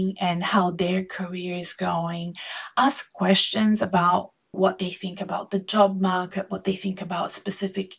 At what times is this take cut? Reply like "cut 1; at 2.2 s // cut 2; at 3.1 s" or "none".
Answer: cut 1; at 4.5 s